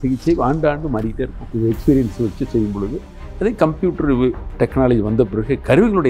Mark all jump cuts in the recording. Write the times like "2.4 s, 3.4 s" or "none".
1.4 s